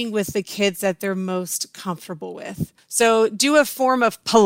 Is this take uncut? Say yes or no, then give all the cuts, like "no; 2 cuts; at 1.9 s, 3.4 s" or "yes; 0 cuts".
no; 1 cut; at 2.8 s